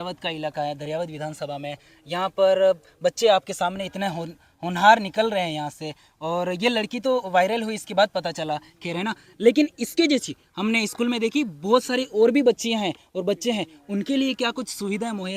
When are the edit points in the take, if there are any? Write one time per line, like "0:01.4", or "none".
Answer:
none